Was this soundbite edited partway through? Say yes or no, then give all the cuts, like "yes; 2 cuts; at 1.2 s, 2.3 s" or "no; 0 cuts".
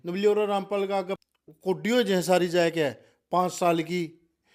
yes; 1 cut; at 1.1 s